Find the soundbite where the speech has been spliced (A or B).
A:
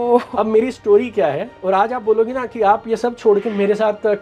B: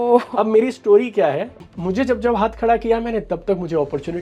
B